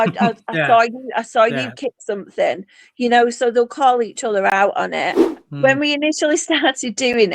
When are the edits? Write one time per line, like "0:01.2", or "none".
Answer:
0:05.2